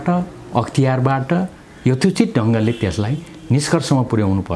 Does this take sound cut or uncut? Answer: uncut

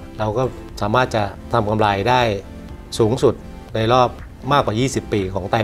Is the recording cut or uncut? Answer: cut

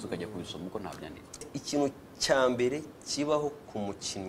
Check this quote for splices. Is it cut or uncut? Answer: cut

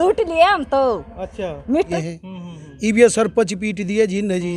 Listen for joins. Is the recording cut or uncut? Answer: cut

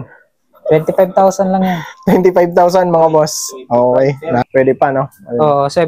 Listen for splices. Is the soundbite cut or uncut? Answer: cut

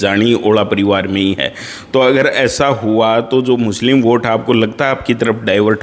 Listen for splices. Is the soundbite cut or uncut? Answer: uncut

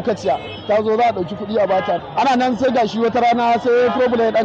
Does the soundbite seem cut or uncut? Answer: cut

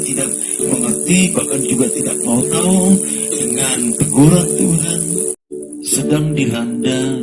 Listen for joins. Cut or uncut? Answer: cut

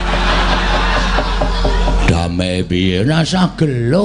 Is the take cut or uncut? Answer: uncut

